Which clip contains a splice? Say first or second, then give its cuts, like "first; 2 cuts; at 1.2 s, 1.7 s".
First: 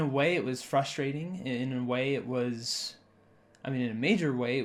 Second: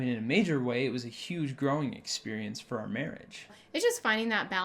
second; 1 cut; at 3.6 s